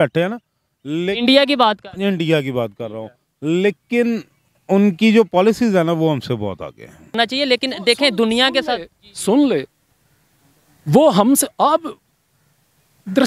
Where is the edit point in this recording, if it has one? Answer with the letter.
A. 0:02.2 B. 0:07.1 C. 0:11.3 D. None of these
B